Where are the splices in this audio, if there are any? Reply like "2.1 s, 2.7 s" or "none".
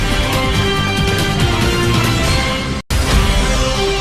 2.9 s